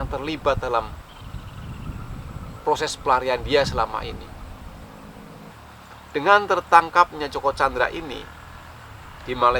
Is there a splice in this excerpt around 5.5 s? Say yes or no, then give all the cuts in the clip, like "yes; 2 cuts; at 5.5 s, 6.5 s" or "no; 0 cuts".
yes; 1 cut; at 5.5 s